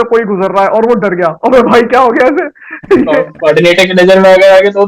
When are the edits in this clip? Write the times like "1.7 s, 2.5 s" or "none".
3.3 s